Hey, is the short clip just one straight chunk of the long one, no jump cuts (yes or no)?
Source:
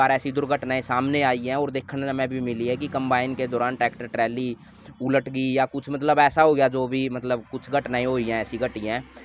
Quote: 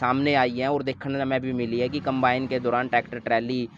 yes